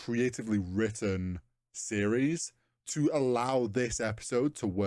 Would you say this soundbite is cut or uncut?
uncut